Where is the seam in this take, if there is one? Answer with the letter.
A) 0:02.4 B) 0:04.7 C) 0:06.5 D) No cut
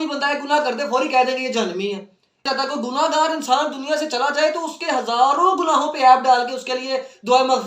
A